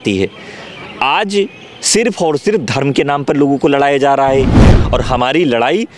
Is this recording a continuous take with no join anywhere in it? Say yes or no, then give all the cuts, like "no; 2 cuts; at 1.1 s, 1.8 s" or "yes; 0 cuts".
no; 1 cut; at 4.6 s